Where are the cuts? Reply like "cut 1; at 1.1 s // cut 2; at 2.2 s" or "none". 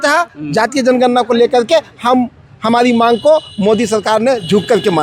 none